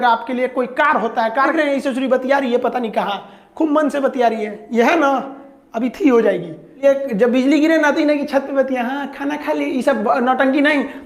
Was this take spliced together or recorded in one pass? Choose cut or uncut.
cut